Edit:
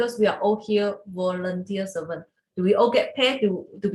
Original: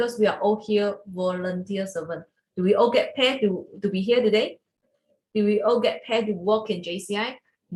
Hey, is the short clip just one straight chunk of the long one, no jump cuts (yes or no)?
yes